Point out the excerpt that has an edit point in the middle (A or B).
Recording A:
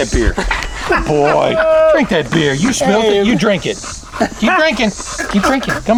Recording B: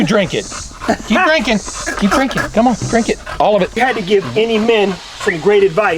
B